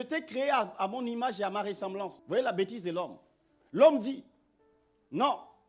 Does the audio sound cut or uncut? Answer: cut